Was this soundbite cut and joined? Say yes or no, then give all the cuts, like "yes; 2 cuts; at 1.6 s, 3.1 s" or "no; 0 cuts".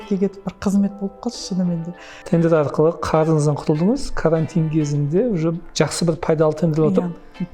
yes; 1 cut; at 2.1 s